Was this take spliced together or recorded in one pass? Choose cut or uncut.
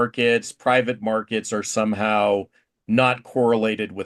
uncut